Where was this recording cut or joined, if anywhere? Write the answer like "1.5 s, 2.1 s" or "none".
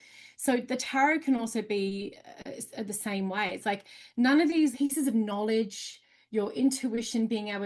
4.7 s

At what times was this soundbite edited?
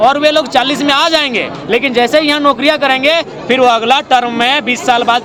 none

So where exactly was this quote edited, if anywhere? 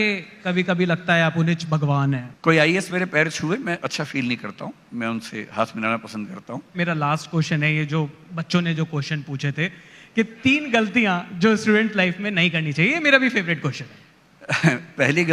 2.3 s, 6.8 s

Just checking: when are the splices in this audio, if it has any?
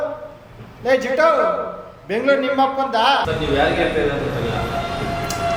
3.2 s

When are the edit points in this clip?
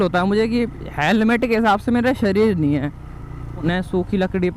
3.6 s

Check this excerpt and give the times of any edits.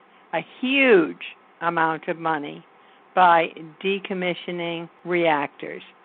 4.9 s

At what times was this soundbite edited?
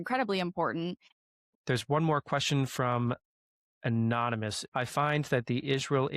1.2 s, 4.6 s

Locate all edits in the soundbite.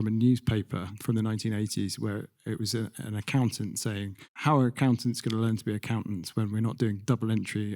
0.9 s

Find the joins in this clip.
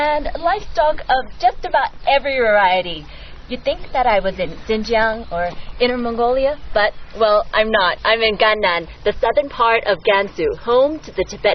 none

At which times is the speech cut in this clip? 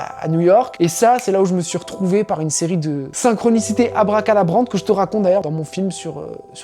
3.1 s, 5.4 s

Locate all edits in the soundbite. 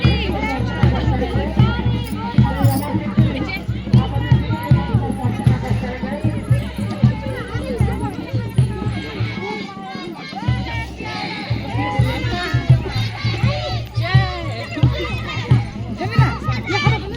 none

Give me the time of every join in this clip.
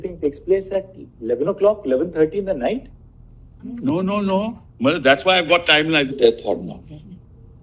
6.1 s

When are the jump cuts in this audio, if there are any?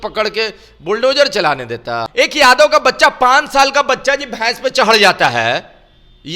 2.0 s

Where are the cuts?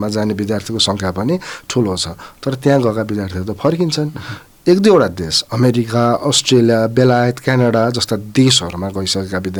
none

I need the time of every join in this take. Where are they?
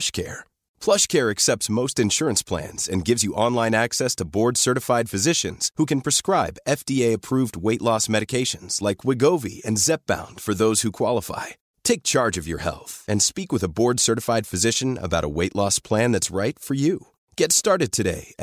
none

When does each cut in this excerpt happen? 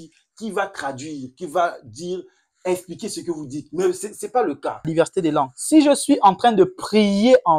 4.9 s

